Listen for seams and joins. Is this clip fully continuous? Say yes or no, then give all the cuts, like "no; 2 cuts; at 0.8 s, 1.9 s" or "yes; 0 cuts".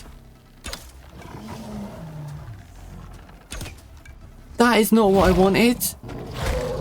no; 2 cuts; at 4.5 s, 5.9 s